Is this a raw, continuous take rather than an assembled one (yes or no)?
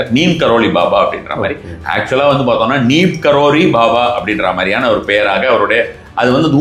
yes